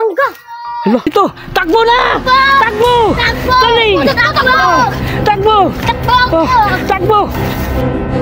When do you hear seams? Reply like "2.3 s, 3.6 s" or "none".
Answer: 1.1 s